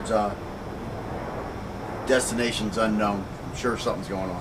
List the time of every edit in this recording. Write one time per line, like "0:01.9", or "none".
0:03.4